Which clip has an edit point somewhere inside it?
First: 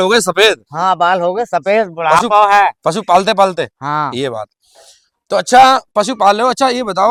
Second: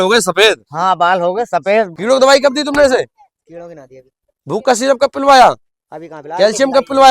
second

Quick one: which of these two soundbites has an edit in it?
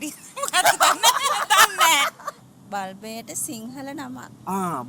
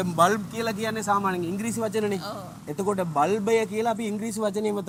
first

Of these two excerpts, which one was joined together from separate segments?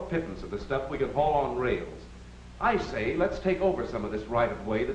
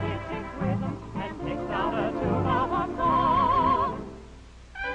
second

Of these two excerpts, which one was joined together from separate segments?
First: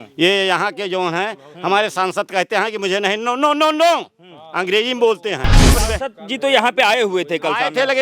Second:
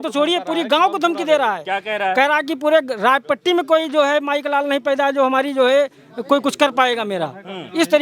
first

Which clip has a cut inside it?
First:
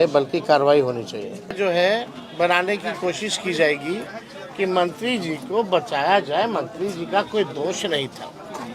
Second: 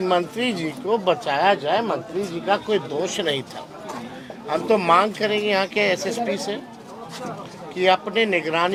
first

